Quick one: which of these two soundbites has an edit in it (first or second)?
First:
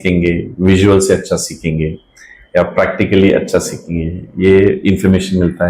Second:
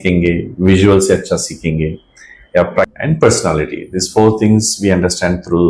second